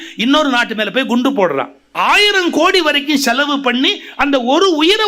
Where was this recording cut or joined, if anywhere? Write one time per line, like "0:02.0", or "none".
0:01.8